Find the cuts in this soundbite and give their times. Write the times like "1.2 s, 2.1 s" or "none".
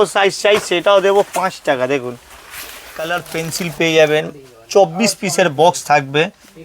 2.9 s